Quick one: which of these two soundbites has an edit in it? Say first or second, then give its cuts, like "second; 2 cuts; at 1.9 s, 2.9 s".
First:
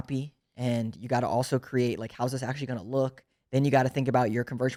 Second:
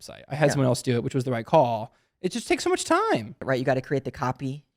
second; 1 cut; at 3.4 s